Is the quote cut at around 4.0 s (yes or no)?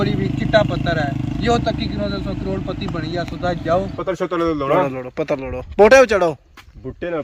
yes